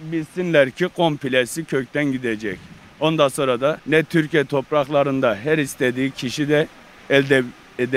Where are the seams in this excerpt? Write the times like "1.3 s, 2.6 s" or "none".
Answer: none